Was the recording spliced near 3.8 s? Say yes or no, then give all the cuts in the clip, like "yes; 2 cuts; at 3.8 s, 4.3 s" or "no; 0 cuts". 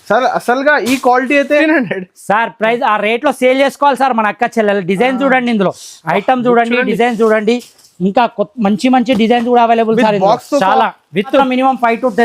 no; 2 cuts; at 1.6 s, 11.4 s